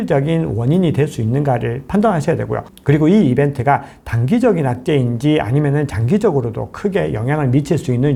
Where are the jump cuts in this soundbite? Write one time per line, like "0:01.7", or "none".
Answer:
none